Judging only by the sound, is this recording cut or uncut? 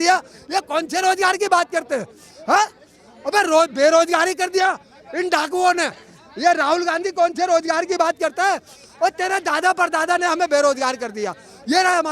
uncut